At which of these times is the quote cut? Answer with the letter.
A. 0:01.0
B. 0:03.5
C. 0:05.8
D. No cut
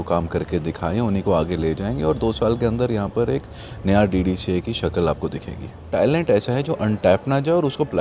C